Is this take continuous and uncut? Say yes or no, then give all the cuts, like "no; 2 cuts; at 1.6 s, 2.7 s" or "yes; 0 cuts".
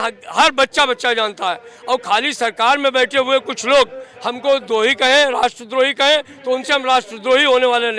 yes; 0 cuts